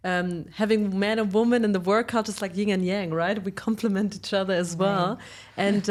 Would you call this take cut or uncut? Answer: uncut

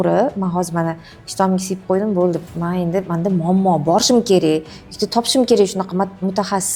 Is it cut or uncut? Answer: uncut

